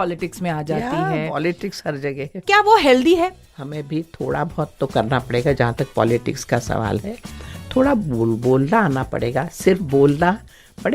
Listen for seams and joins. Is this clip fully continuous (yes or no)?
no